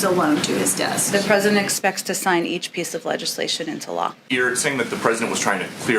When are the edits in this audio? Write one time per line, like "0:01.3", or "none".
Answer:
0:04.2